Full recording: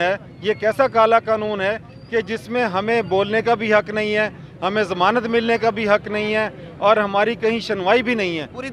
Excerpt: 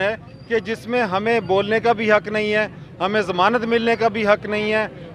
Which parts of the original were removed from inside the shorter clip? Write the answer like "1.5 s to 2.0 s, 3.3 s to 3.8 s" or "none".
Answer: none